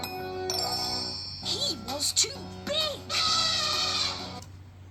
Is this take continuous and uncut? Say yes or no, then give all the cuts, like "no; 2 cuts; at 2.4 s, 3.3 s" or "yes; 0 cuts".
yes; 0 cuts